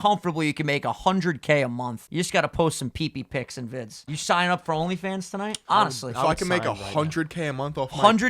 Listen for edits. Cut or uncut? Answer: cut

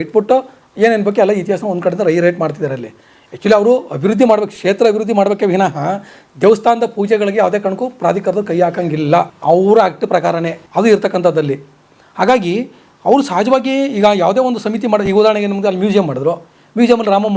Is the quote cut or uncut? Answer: uncut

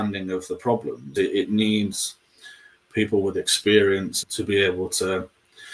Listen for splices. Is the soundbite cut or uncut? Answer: cut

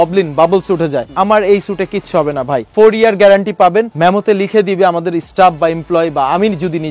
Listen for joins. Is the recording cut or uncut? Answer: uncut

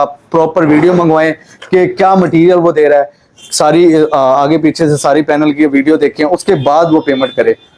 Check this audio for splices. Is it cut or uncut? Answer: uncut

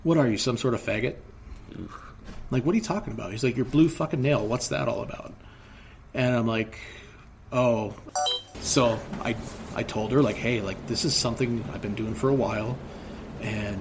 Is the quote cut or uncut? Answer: cut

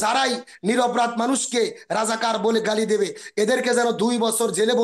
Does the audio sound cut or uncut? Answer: uncut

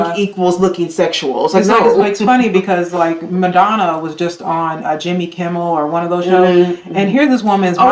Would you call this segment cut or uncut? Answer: uncut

